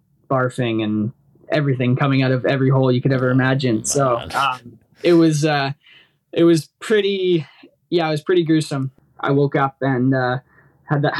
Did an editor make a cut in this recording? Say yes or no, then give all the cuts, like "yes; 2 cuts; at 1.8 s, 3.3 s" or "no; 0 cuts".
yes; 1 cut; at 8.9 s